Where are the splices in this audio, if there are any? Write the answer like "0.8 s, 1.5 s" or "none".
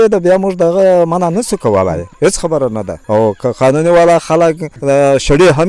2.1 s, 2.9 s, 4.7 s